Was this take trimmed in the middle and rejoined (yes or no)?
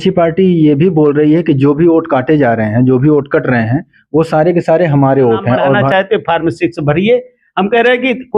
yes